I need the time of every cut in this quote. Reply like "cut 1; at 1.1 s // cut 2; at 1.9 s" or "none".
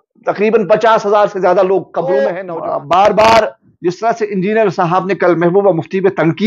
cut 1; at 2.4 s